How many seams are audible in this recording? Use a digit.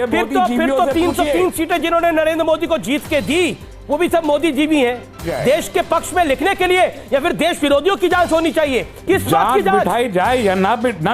2